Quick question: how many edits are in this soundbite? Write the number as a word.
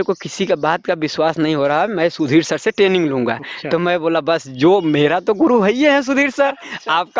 zero